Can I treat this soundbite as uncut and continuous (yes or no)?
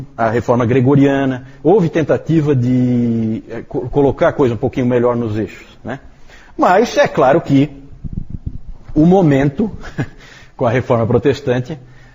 no